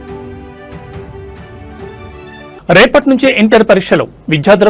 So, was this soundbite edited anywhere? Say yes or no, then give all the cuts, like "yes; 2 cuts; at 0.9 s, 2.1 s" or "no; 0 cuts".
yes; 1 cut; at 2.5 s